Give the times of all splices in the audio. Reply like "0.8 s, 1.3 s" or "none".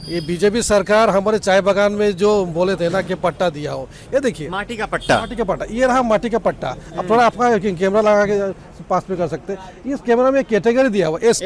none